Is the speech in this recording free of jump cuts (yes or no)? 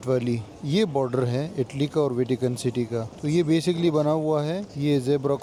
yes